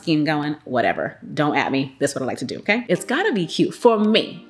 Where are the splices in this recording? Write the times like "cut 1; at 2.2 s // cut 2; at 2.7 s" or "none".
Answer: cut 1; at 2.8 s